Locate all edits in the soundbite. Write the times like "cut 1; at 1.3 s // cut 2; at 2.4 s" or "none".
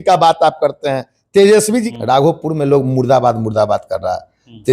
cut 1; at 1.9 s